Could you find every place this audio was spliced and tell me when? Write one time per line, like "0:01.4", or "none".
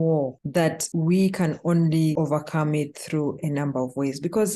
0:00.9
0:02.1